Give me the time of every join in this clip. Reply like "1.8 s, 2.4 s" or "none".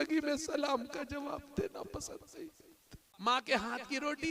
3.0 s